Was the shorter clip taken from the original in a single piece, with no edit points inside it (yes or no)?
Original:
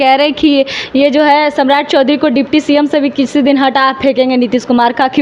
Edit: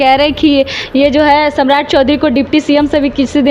yes